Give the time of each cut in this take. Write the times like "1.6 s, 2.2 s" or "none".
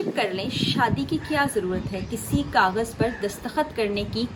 none